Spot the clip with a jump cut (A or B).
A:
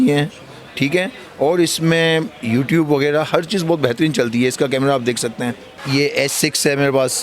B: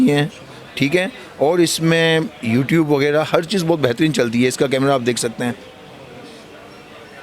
A